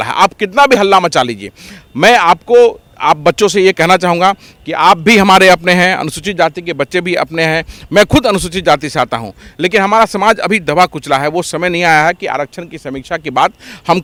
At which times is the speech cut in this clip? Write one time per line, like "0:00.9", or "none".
none